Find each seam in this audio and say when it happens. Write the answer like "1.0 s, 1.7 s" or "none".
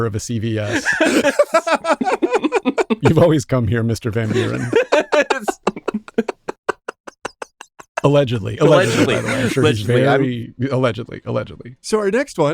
11.6 s